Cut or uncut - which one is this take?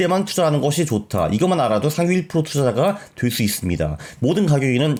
uncut